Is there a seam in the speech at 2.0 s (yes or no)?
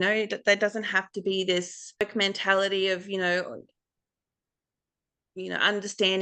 yes